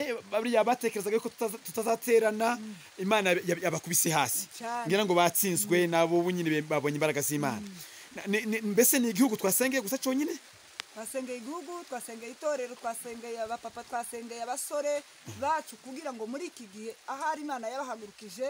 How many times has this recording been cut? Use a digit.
0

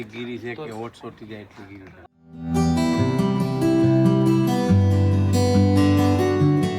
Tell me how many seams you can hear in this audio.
1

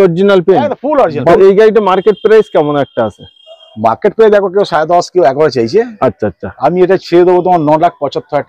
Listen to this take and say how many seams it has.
1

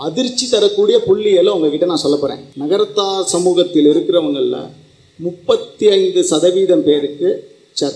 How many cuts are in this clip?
1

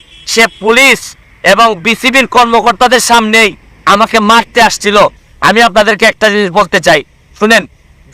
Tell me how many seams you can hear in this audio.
1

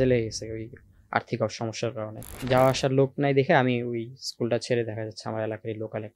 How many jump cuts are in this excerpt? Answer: 1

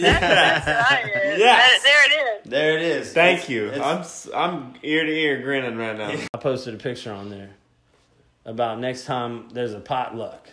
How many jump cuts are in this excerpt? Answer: 1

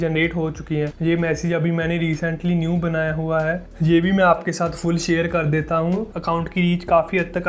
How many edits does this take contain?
2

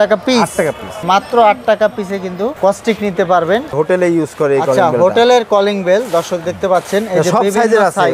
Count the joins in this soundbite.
1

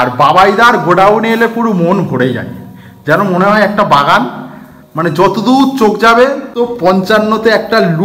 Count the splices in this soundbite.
1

